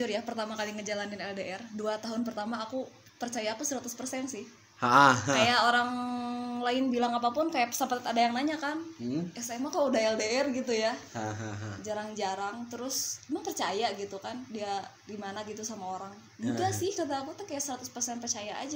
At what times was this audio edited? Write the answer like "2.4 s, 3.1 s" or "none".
none